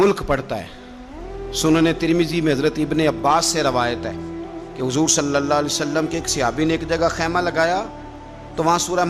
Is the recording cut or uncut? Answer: uncut